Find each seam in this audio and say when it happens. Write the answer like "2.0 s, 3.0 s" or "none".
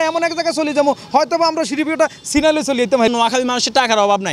3.1 s